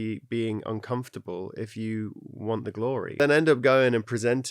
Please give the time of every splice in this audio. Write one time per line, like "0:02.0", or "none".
0:03.2